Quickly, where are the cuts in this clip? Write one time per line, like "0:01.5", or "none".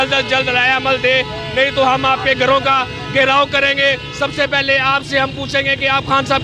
none